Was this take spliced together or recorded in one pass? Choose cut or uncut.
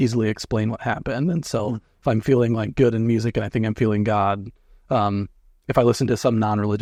uncut